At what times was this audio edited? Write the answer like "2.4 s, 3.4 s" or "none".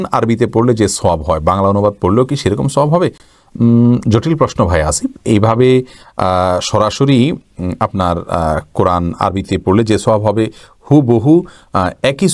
none